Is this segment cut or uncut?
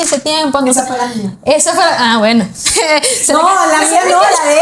uncut